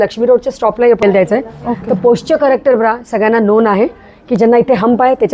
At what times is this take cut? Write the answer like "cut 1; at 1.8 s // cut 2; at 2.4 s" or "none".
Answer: cut 1; at 1.0 s